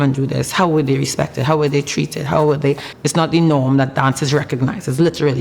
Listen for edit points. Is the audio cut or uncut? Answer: cut